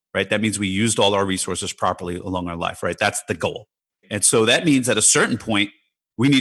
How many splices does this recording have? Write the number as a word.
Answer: zero